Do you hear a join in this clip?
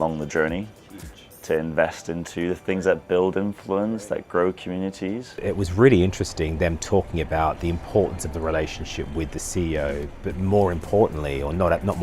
yes; 1 cut; at 5.4 s

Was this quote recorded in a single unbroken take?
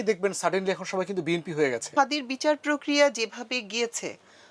no; 1 cut; at 1.9 s

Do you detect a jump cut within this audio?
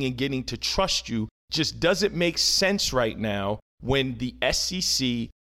yes; 2 cuts; at 1.4 s, 3.7 s

